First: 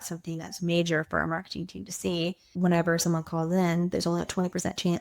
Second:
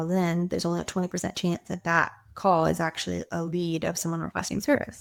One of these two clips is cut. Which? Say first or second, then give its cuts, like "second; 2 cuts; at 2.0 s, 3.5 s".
first; 1 cut; at 2.5 s